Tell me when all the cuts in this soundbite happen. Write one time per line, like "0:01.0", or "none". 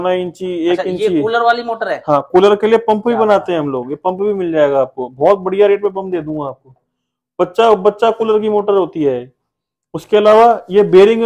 none